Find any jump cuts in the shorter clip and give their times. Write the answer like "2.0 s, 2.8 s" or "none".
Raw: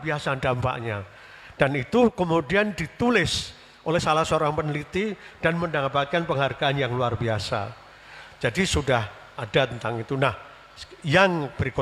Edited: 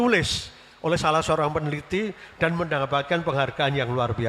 none